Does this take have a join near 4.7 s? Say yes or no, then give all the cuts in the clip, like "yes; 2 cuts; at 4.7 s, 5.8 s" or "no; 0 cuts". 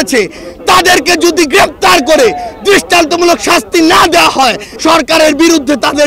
yes; 1 cut; at 4.7 s